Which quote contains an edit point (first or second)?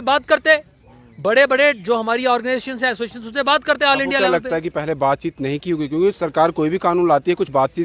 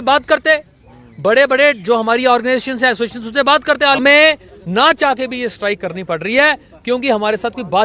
second